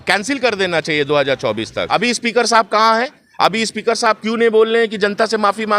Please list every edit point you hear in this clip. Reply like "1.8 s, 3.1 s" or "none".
1.8 s